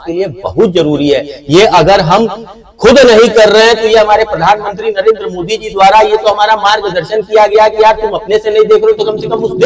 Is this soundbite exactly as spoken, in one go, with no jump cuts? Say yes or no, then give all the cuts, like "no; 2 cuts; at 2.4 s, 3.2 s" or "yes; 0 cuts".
yes; 0 cuts